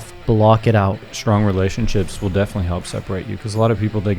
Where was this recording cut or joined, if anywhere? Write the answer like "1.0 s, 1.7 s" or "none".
1.1 s

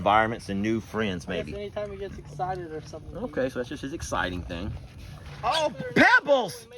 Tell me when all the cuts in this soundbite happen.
5.5 s

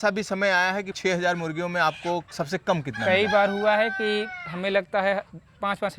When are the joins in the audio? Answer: 0.9 s

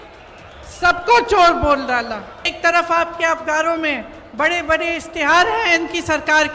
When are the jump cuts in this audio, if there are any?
2.5 s

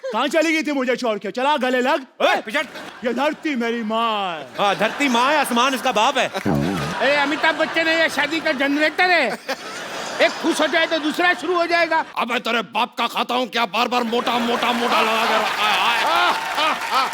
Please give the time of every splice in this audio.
2.8 s, 6.9 s, 12.1 s

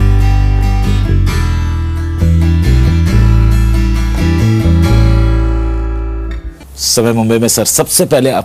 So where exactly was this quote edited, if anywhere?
6.4 s

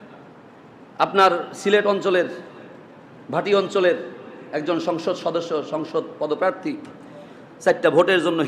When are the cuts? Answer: none

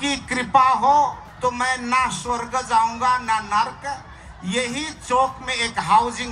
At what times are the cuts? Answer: 1.2 s

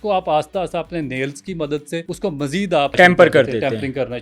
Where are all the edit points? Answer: 2.1 s, 2.9 s

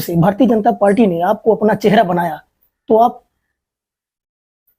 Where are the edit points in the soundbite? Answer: none

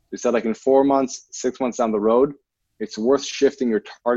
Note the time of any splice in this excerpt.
none

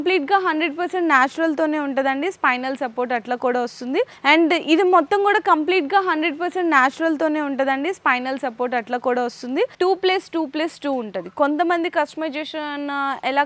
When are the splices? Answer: 4.1 s, 9.7 s

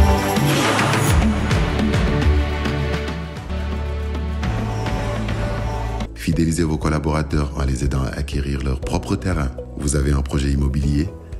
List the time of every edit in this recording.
6.1 s

